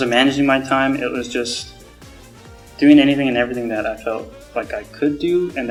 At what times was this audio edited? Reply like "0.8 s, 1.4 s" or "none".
none